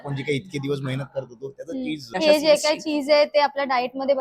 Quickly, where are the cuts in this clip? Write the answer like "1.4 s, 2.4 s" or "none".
2.0 s